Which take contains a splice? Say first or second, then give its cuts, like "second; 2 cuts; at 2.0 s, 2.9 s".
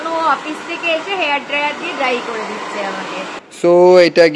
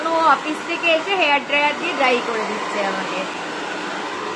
first; 1 cut; at 3.4 s